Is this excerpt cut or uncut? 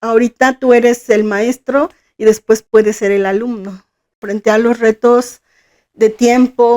cut